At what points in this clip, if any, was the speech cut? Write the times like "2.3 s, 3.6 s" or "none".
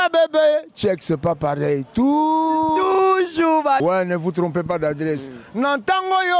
3.8 s